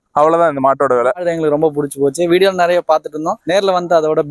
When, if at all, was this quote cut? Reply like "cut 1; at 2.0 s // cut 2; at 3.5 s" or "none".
cut 1; at 1.2 s // cut 2; at 3.3 s